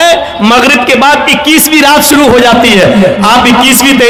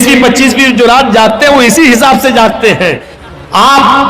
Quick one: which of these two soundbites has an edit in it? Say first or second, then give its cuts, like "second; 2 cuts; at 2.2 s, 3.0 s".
second; 1 cut; at 3.1 s